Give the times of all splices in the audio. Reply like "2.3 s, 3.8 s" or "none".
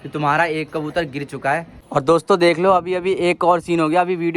1.8 s